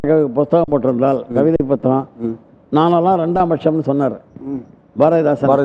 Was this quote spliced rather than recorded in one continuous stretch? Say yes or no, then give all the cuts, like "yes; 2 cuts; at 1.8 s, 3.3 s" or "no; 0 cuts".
no; 0 cuts